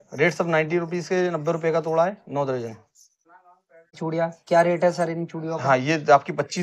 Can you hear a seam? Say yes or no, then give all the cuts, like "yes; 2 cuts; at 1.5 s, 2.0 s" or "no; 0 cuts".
yes; 1 cut; at 3.9 s